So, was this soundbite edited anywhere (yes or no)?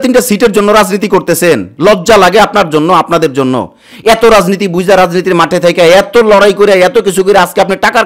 no